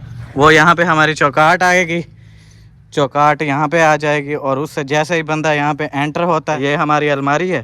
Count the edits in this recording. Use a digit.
1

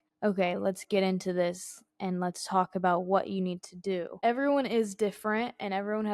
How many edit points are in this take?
1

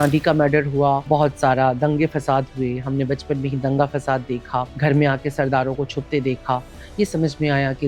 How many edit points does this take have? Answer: 2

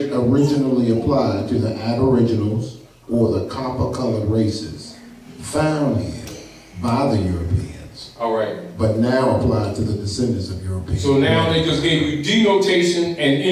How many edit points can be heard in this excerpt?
0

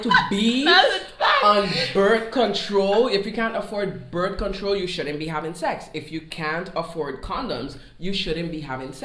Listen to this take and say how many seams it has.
0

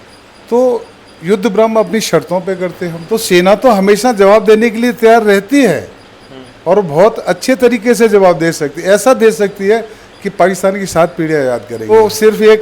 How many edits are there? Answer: 2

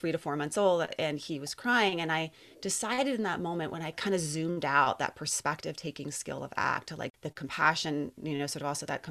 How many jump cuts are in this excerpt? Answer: 2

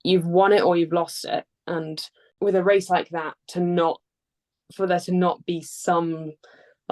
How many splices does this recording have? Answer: 1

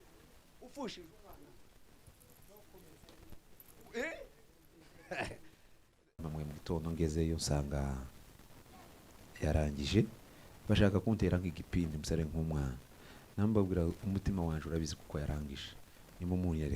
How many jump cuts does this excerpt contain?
1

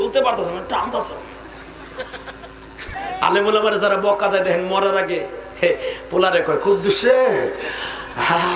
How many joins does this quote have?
1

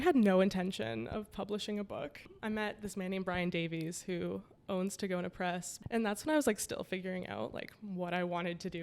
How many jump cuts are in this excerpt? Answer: 2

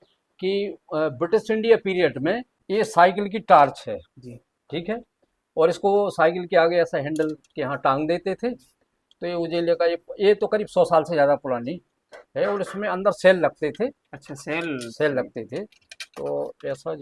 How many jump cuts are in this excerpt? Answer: 1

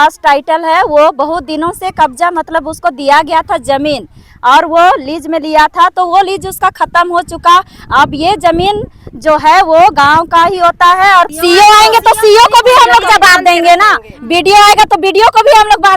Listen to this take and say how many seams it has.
1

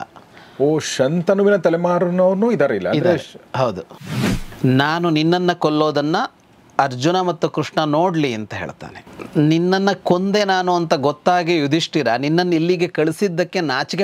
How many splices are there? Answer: 1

